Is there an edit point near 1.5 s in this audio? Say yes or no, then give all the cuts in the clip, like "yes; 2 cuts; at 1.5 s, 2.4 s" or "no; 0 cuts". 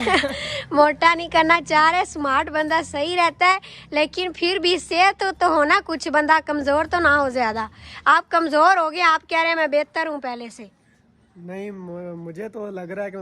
no; 0 cuts